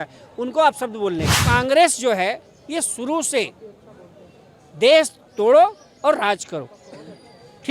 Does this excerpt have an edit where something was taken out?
yes; 1 cut; at 1.4 s

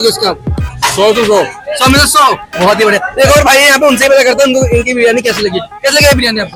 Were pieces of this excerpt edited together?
no; 0 cuts

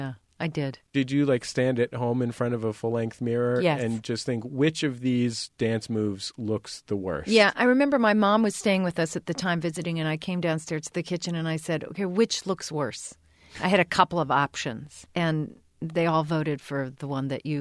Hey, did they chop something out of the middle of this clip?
yes; 2 cuts; at 0.9 s, 15.0 s

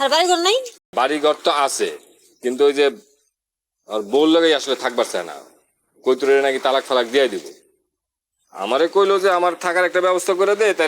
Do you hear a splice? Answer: yes; 1 cut; at 0.9 s

